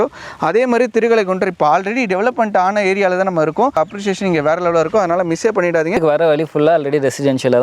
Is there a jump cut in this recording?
yes; 2 cuts; at 3.7 s, 6.0 s

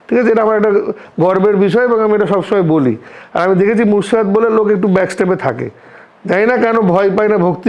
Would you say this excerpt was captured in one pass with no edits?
yes; 0 cuts

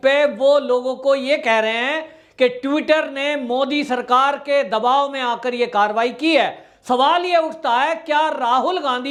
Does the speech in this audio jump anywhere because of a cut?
no; 0 cuts

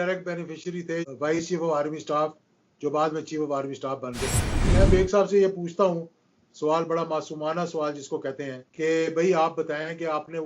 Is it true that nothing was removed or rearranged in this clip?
no; 2 cuts; at 1.1 s, 4.7 s

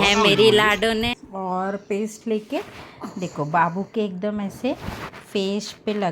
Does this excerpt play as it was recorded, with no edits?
no; 1 cut; at 1.1 s

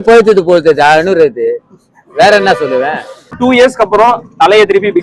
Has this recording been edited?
yes; 1 cut; at 3.4 s

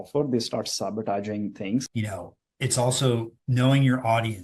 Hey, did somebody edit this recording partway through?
yes; 1 cut; at 1.8 s

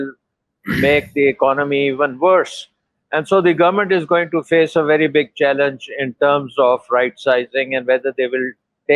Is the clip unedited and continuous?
yes; 0 cuts

